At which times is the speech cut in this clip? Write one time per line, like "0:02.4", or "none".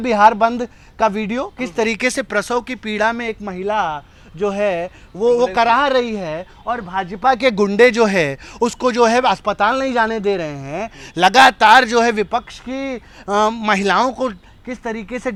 none